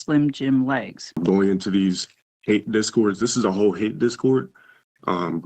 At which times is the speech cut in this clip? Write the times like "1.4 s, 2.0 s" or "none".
1.2 s